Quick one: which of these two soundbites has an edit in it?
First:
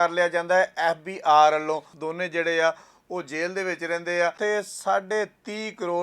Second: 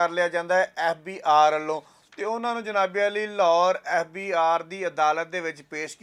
first; 2 cuts; at 2.0 s, 4.4 s

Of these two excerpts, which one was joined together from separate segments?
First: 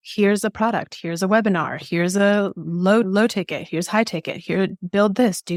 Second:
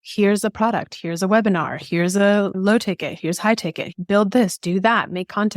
second; 2 cuts; at 2.6 s, 3.9 s

